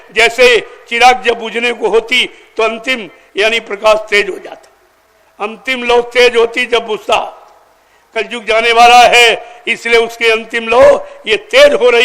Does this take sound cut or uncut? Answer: uncut